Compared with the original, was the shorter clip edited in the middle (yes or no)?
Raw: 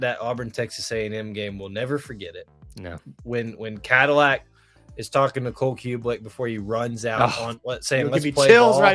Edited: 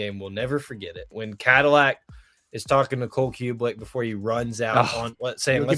yes